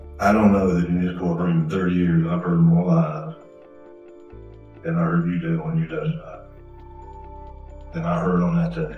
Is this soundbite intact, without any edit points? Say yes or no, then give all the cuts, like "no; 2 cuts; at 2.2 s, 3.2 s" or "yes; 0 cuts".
no; 2 cuts; at 6.4 s, 7.9 s